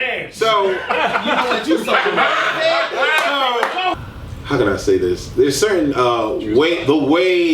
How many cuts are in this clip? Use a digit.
1